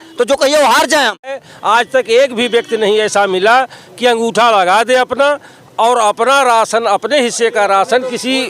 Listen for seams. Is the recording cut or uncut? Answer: cut